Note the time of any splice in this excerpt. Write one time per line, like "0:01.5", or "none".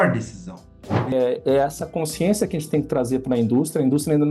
0:01.1

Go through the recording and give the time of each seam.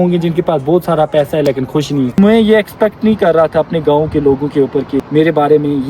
0:02.1
0:05.1

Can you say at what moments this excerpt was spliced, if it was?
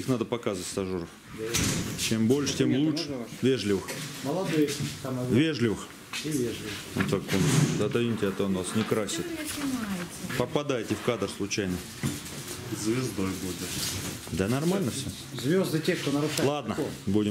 none

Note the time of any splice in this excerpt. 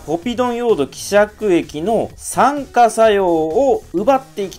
none

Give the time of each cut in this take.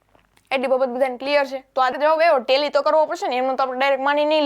0:01.9

